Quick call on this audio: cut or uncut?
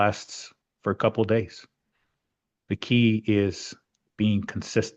uncut